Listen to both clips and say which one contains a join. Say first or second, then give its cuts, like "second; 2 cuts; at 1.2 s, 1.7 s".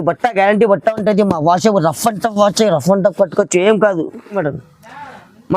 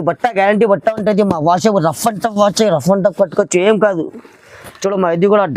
first; 1 cut; at 4.4 s